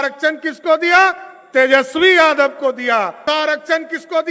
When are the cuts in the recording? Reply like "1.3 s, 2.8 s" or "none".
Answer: 3.2 s